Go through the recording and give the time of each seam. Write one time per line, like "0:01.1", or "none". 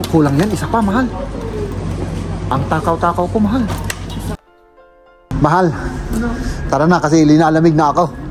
0:04.6